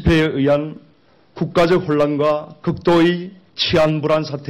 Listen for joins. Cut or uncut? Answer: uncut